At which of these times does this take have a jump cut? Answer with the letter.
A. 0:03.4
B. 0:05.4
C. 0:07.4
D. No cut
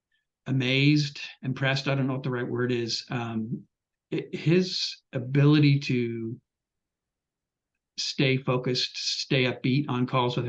D